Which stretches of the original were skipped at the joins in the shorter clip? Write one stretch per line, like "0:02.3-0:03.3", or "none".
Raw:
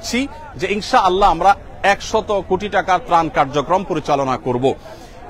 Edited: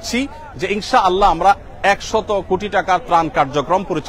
none